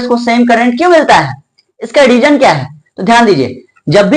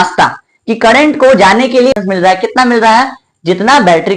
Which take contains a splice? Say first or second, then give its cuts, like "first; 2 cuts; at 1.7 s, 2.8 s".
second; 1 cut; at 1.9 s